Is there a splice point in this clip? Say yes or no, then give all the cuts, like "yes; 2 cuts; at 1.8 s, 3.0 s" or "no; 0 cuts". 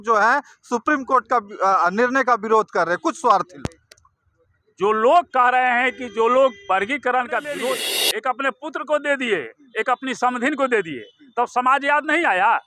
yes; 1 cut; at 7.8 s